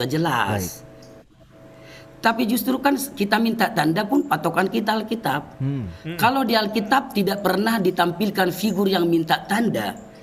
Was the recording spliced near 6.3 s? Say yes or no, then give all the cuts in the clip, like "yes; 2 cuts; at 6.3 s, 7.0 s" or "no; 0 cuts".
no; 0 cuts